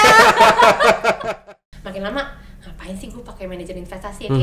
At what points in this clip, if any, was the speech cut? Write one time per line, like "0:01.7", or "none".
0:01.2

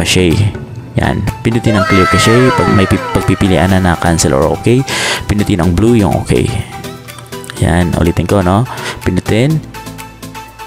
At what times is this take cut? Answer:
0:02.7

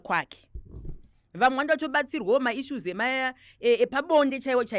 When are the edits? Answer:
0:01.2

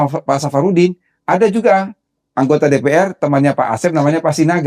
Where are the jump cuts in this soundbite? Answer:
none

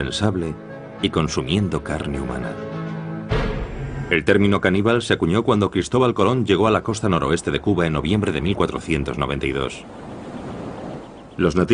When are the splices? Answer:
none

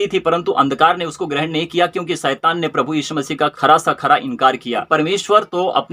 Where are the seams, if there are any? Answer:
0:04.9

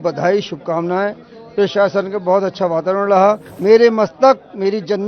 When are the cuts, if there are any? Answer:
0:03.5

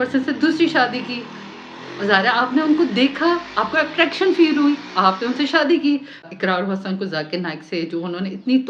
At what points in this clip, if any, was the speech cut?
0:06.2

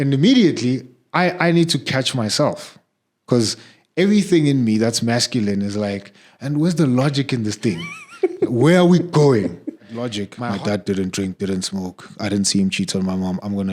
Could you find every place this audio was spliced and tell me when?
0:10.3

